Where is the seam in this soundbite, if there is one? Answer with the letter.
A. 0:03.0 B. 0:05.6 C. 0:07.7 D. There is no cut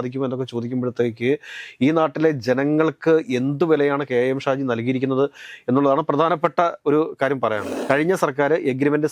C